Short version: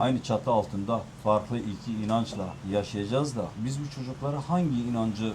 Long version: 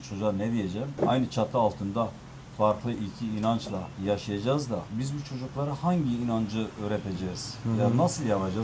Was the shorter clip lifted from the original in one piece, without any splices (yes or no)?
no